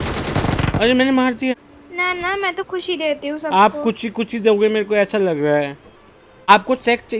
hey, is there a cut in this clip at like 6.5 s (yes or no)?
yes